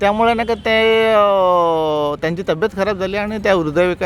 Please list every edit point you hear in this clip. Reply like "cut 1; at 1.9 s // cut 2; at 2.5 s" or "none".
none